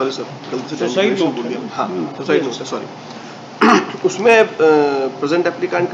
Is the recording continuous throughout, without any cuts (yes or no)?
yes